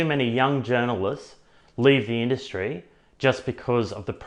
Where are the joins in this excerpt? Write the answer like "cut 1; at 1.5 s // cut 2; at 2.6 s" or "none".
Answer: none